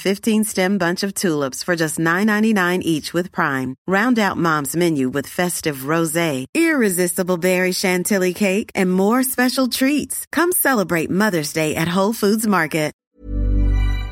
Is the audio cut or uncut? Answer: cut